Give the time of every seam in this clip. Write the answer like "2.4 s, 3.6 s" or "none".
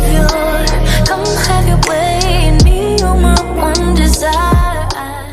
none